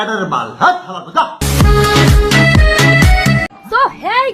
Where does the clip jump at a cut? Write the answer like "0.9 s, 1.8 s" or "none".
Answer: 3.4 s